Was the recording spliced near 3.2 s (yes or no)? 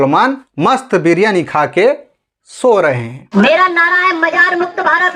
yes